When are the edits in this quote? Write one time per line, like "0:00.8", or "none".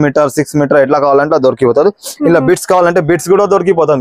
none